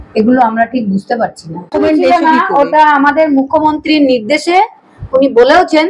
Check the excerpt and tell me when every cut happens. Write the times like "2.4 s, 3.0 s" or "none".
1.7 s